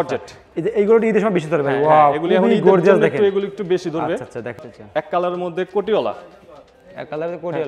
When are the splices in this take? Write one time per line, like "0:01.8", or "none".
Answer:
0:04.6